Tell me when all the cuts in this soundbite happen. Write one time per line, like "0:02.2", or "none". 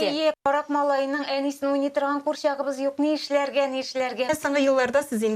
0:04.3